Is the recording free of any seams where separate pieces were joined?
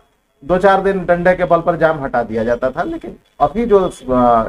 yes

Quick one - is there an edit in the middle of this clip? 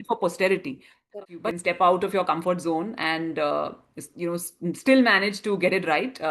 yes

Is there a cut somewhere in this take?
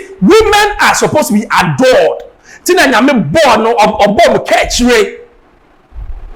no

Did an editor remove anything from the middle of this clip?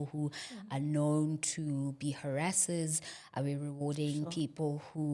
no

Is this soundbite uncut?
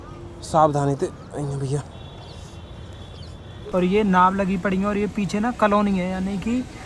no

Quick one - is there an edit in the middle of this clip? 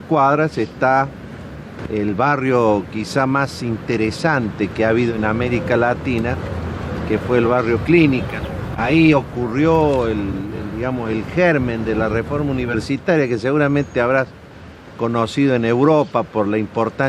yes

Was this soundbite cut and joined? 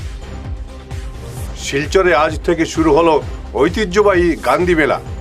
no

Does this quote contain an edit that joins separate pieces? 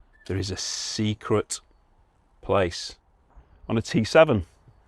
yes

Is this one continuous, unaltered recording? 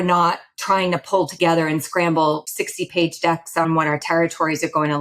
no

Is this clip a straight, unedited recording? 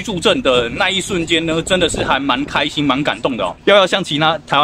no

